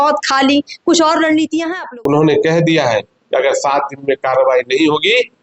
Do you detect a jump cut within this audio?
yes; 1 cut; at 1.8 s

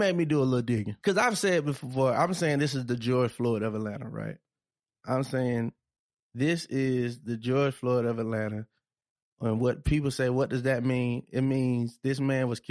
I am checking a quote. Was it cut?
yes; 1 cut; at 0.9 s

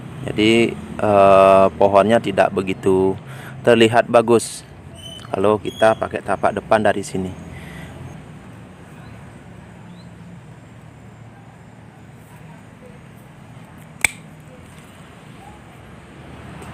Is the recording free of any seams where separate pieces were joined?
no; 1 cut; at 8.1 s

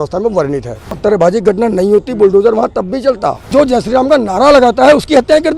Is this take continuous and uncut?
no; 2 cuts; at 0.9 s, 3.5 s

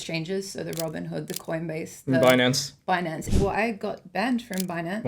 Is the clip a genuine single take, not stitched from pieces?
no; 1 cut; at 3.2 s

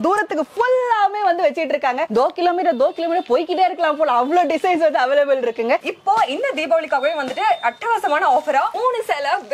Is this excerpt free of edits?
no; 1 cut; at 5.8 s

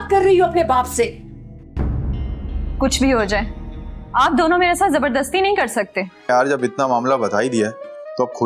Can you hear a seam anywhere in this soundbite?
yes; 1 cut; at 6.3 s

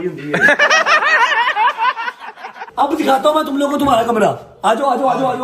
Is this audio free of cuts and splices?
no; 2 cuts; at 0.7 s, 2.6 s

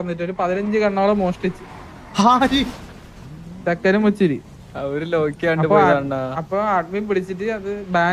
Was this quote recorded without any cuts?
yes; 0 cuts

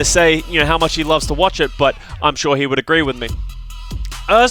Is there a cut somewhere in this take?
no; 0 cuts

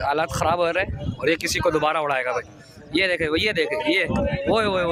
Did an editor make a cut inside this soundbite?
no; 0 cuts

